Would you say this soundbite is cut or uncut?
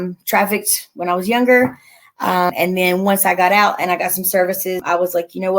cut